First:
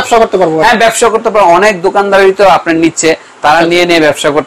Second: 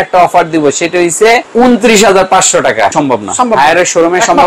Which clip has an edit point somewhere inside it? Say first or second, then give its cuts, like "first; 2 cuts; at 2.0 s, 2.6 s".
second; 2 cuts; at 1.5 s, 2.9 s